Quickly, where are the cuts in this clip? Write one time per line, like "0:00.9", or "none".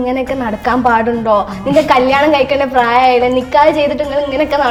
none